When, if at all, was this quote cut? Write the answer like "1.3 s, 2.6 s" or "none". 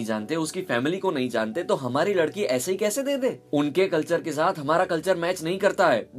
3.4 s